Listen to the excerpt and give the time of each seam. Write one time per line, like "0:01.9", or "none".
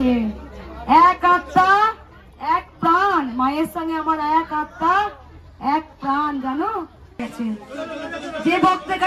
0:07.2